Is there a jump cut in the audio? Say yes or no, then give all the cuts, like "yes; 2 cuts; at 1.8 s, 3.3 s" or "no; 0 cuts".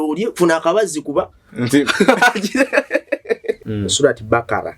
yes; 1 cut; at 3.6 s